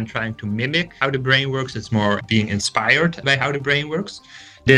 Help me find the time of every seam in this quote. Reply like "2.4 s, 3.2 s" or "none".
1.0 s, 2.2 s, 3.2 s